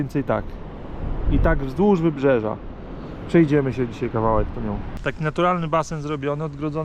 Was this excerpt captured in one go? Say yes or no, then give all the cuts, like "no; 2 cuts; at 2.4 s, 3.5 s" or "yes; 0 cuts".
no; 1 cut; at 4.8 s